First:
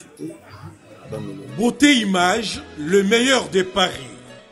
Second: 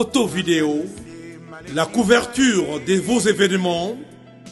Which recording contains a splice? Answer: first; 1 cut; at 1.4 s

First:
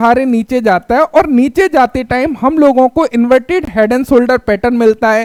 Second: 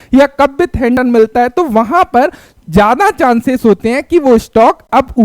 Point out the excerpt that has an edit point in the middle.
second; 1 cut; at 1.0 s

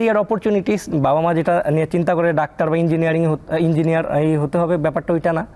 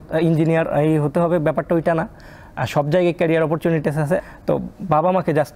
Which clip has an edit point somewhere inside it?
second; 1 cut; at 4.2 s

